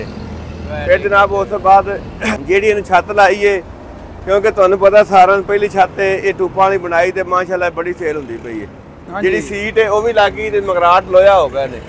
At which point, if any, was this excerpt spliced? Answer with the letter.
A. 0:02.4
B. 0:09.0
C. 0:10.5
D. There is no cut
A